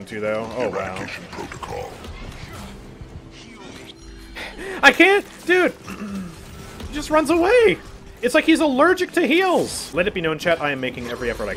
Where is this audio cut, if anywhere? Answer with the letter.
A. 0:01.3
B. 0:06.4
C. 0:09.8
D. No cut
C